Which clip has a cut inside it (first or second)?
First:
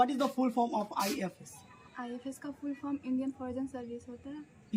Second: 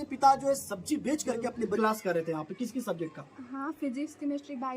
second